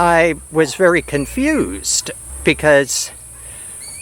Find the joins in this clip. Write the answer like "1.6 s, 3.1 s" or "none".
2.2 s